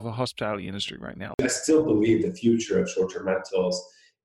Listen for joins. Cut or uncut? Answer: cut